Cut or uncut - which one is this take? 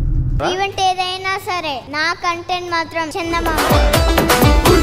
uncut